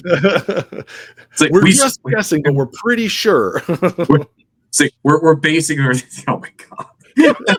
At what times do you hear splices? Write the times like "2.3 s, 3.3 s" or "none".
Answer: none